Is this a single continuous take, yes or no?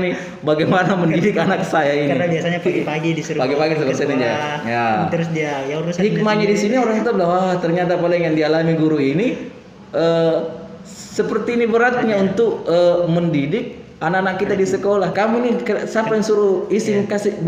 no